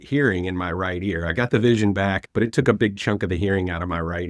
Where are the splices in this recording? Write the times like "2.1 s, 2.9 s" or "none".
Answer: 2.2 s